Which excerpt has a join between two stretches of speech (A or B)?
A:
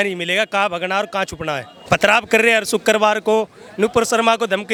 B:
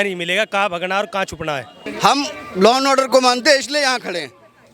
B